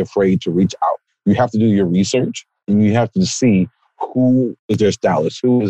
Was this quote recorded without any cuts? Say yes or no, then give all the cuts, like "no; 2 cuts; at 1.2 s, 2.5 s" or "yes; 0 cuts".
no; 2 cuts; at 1.1 s, 4.6 s